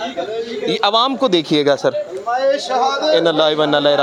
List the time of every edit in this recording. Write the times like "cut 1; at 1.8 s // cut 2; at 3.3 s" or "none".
none